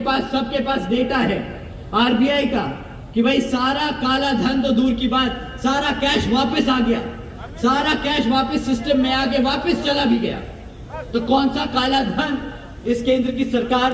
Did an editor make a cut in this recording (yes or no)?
no